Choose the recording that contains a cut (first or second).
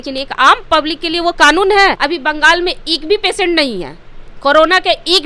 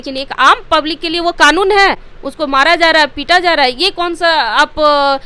first